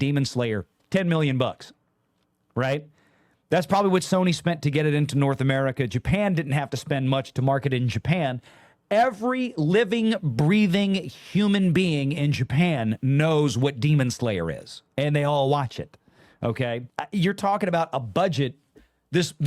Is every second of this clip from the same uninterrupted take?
yes; 0 cuts

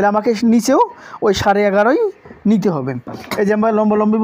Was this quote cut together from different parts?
no; 0 cuts

